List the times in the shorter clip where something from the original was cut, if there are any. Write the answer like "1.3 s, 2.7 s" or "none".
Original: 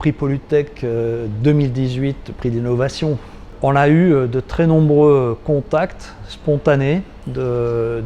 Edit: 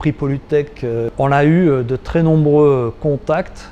1.1 s